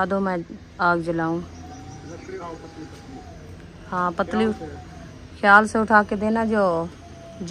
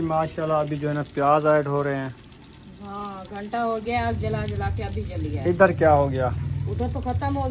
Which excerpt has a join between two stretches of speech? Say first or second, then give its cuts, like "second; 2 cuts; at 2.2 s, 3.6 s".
first; 1 cut; at 2.4 s